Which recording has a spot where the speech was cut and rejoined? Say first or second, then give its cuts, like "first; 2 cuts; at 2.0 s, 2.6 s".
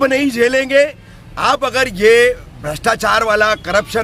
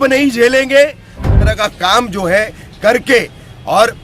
second; 1 cut; at 1.5 s